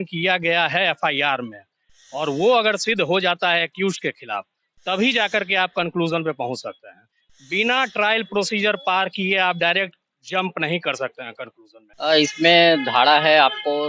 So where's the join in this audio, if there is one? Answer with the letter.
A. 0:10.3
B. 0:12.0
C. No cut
B